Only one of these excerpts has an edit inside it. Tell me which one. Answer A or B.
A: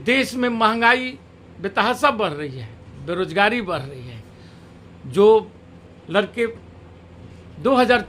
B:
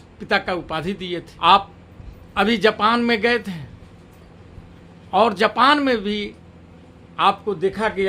B